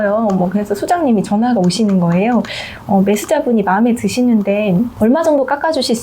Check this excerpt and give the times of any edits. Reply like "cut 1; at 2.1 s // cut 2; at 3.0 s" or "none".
cut 1; at 4.9 s